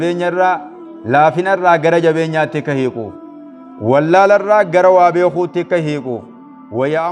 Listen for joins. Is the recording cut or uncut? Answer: uncut